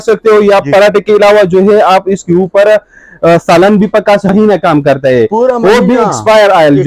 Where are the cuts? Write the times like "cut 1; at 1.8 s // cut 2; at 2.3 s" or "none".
cut 1; at 4.3 s